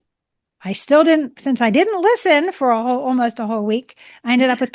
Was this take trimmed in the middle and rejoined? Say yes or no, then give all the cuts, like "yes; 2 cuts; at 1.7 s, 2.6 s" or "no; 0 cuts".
no; 0 cuts